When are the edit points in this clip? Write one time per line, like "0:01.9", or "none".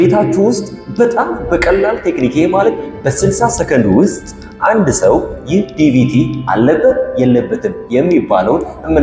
none